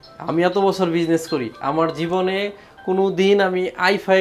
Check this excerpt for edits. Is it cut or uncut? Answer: uncut